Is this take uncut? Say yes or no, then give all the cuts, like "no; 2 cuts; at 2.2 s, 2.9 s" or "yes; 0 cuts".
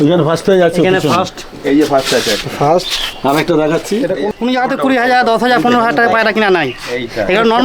no; 1 cut; at 4.2 s